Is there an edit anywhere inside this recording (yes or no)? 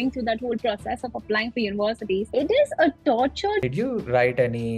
yes